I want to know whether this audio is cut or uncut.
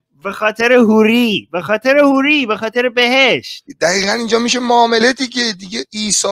cut